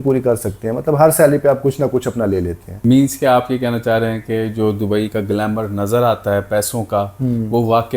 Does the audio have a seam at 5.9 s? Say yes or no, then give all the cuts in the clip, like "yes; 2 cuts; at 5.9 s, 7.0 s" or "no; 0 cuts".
no; 1 cut; at 2.6 s